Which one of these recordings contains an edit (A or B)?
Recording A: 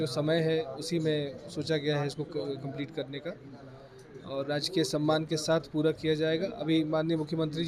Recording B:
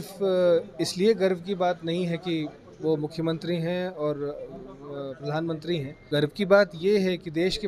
B